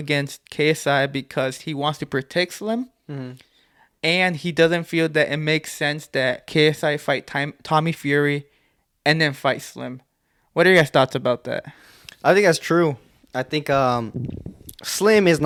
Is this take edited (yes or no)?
no